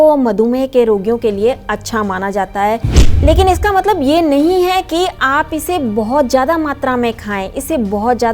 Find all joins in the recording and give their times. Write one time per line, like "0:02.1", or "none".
0:03.2